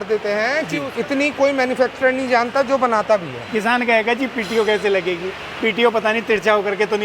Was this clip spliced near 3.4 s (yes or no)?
yes